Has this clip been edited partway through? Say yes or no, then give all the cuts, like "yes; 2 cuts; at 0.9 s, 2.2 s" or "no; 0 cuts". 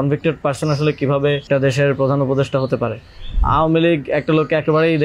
yes; 2 cuts; at 1.5 s, 3.4 s